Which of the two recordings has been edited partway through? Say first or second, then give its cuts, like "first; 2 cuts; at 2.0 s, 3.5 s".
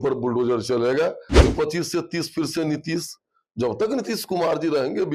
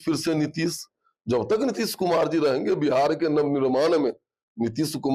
first; 1 cut; at 1.3 s